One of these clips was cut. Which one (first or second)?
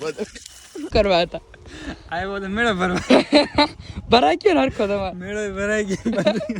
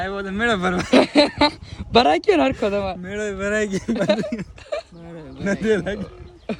first